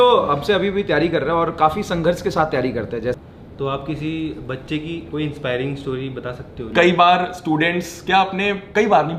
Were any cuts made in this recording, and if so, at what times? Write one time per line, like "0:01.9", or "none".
0:03.2
0:06.6